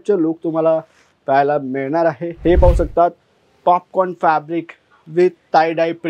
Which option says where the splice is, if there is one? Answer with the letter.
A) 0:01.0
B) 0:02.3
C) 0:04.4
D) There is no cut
B